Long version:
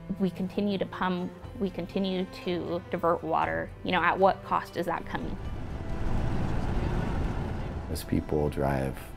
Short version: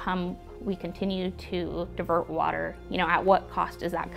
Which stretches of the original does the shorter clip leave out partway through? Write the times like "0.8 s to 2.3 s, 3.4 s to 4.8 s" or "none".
none